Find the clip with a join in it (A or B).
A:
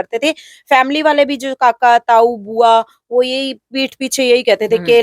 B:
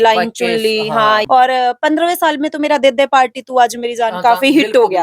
B